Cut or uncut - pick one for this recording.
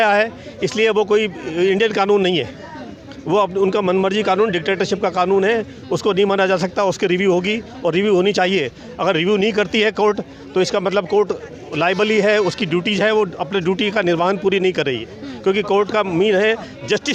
uncut